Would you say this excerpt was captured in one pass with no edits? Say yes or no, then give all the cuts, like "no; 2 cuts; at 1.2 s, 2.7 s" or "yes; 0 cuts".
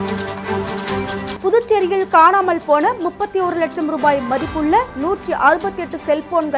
no; 1 cut; at 1.2 s